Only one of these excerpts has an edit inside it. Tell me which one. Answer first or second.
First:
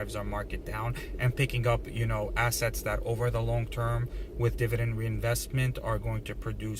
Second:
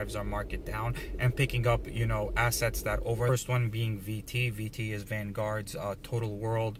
first